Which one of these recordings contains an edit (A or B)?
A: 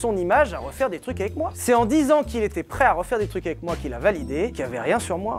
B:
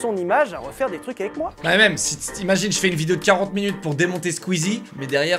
B